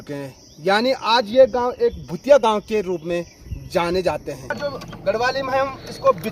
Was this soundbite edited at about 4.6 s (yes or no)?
yes